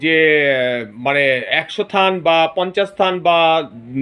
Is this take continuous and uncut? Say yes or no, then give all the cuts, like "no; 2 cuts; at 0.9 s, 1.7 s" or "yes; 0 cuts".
yes; 0 cuts